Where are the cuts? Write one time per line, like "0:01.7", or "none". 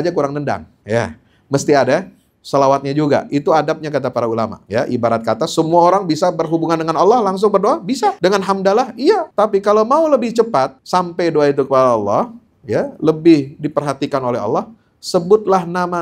0:04.6
0:08.2
0:09.3
0:10.8